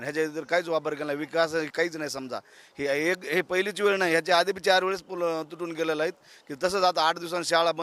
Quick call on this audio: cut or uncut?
uncut